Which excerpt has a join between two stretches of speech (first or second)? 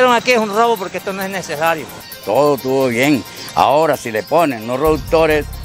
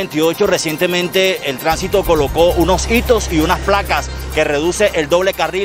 first